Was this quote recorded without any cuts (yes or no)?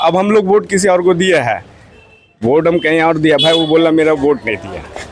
yes